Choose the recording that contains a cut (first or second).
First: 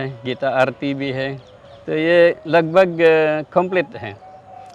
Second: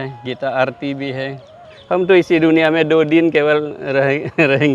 second